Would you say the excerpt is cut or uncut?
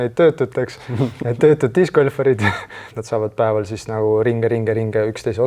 cut